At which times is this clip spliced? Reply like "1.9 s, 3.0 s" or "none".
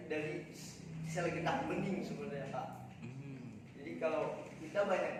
none